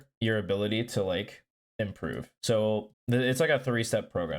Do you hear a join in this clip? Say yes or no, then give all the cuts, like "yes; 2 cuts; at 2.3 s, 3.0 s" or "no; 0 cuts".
yes; 2 cuts; at 2.3 s, 2.9 s